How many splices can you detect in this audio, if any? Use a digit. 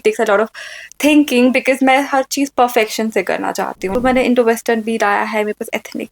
1